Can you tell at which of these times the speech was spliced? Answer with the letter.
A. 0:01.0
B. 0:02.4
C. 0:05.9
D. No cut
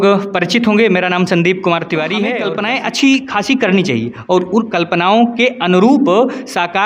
B